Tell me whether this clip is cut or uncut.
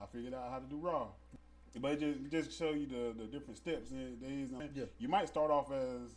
cut